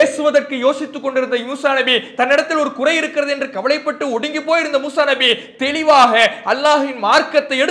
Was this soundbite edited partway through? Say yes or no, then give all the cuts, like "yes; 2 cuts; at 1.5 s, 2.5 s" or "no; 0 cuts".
no; 0 cuts